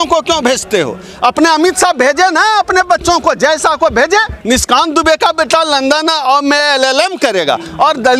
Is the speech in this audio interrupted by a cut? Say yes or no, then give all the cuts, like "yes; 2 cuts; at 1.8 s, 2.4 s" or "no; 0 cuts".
yes; 1 cut; at 4.3 s